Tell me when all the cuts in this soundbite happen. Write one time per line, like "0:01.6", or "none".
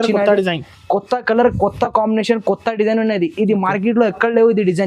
none